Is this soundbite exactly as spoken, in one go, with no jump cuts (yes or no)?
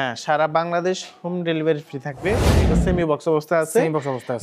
no